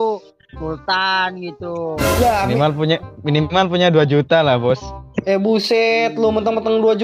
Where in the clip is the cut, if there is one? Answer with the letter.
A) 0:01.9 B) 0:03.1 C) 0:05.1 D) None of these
D